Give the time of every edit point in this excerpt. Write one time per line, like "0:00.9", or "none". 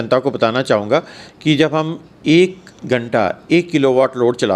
0:02.7